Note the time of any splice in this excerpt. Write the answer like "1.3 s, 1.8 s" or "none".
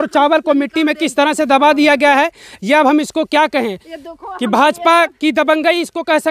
none